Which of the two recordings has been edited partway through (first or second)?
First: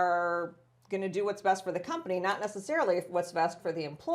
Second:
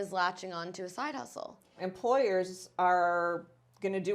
second